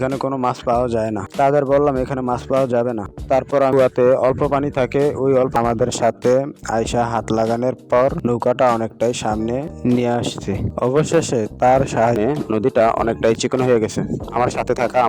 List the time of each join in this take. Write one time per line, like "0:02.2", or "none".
0:03.7
0:05.6
0:12.2